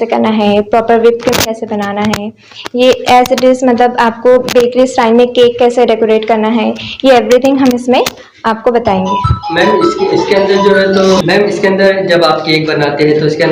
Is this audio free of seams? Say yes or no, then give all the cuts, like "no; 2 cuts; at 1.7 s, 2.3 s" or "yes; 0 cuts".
yes; 0 cuts